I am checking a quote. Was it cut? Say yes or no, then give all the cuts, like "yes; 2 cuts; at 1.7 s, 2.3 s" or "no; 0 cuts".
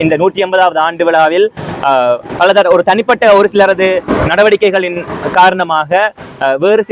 no; 0 cuts